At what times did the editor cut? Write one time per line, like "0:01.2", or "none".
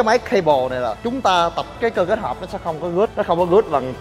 0:01.7
0:03.1